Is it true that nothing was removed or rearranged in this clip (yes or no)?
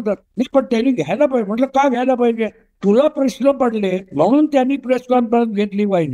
yes